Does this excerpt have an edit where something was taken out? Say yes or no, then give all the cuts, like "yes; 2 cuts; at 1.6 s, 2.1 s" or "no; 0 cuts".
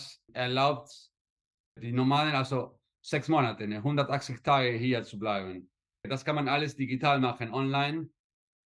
yes; 1 cut; at 6.1 s